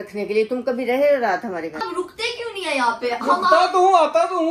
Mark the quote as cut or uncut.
uncut